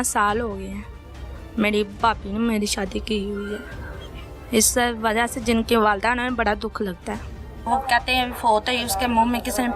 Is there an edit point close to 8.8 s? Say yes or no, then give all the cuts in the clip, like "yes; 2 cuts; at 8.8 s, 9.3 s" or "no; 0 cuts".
no; 1 cut; at 7.5 s